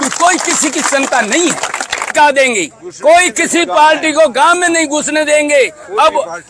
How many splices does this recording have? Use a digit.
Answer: 1